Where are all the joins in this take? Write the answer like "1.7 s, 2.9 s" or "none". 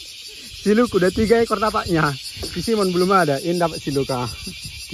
none